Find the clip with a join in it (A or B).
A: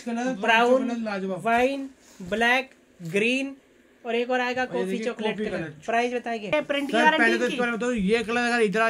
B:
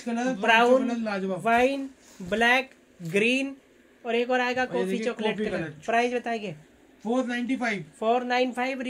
A